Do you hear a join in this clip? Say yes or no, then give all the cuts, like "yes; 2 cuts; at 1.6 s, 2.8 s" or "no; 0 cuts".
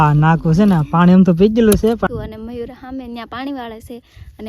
yes; 1 cut; at 2.1 s